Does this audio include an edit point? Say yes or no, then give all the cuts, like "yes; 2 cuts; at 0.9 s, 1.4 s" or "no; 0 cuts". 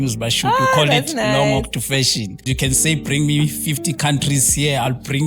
yes; 1 cut; at 2.5 s